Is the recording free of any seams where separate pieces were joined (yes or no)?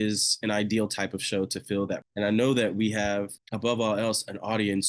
no